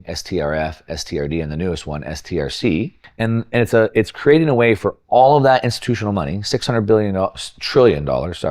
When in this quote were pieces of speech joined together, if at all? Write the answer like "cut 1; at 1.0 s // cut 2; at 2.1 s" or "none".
cut 1; at 3.0 s